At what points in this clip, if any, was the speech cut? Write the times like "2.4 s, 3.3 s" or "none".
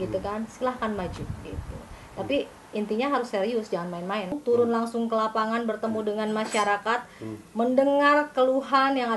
4.4 s